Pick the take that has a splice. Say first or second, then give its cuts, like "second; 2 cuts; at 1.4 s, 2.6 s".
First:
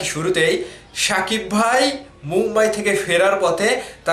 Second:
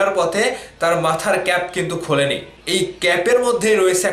second; 1 cut; at 2.5 s